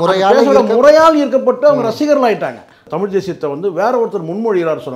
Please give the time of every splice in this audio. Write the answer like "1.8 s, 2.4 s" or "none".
2.8 s